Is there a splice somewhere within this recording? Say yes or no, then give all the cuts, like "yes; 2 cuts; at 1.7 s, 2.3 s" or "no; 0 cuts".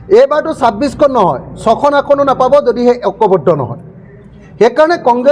no; 0 cuts